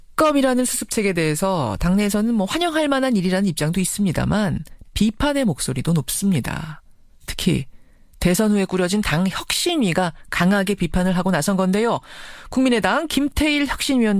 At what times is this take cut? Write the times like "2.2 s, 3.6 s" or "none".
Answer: 1.6 s